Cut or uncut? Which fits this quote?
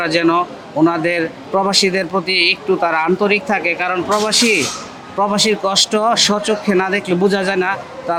uncut